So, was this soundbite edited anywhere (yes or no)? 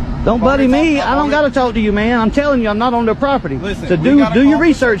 no